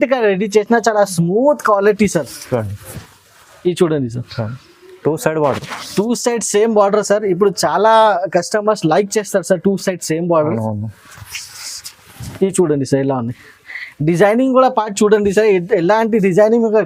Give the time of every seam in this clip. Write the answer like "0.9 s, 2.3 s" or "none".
none